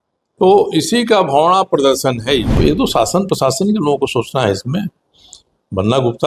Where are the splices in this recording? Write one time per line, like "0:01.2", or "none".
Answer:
0:02.5

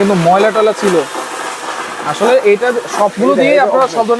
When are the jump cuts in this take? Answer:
none

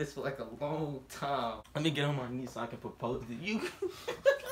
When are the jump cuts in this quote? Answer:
0:01.6

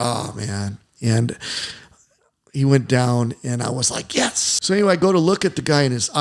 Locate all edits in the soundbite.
0:04.5

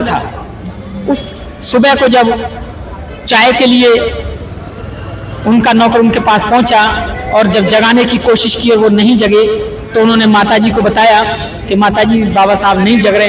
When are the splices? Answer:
0:01.2

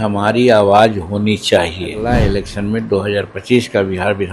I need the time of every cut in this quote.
0:02.0

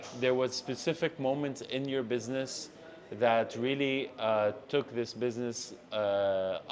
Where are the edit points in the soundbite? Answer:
none

